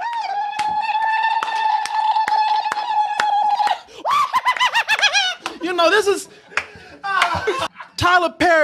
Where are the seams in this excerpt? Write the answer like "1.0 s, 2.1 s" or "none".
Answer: 7.7 s